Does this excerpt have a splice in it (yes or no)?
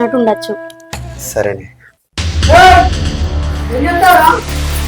yes